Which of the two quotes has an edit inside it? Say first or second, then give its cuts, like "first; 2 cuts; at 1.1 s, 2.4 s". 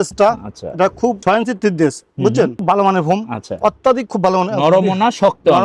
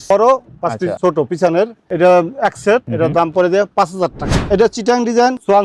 second; 2 cuts; at 0.9 s, 4.3 s